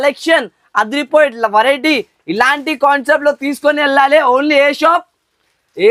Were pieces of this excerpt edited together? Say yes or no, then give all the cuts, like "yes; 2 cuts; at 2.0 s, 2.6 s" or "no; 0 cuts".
no; 0 cuts